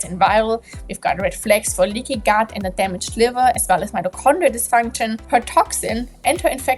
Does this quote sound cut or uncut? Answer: cut